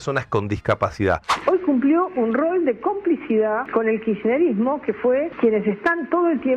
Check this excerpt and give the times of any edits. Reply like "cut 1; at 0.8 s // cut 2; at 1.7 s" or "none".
cut 1; at 1.3 s // cut 2; at 3.6 s // cut 3; at 5.3 s